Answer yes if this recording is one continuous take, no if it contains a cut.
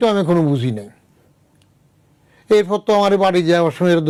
yes